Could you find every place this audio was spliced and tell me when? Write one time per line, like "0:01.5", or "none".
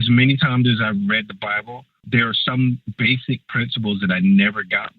0:02.0
0:02.9